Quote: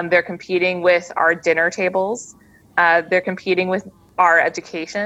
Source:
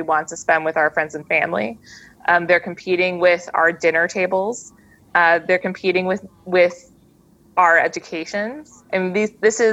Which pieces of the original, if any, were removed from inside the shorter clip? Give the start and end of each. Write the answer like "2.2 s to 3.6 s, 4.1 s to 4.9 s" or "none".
6.3 s to 7.3 s